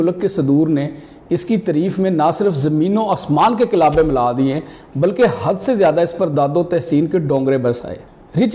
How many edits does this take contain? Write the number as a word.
zero